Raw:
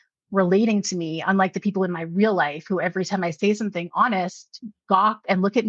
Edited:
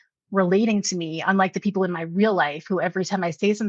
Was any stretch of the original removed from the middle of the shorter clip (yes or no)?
no